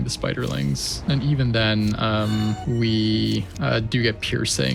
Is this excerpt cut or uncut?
cut